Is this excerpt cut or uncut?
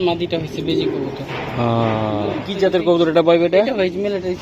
cut